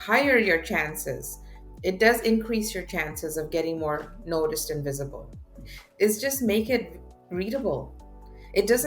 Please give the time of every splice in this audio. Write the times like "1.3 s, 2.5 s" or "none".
5.8 s